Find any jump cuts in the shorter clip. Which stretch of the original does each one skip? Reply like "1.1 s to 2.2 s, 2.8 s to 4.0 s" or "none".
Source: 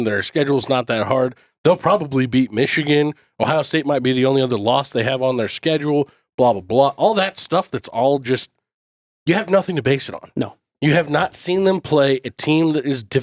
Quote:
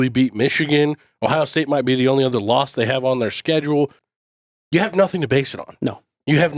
6.2 s to 8.6 s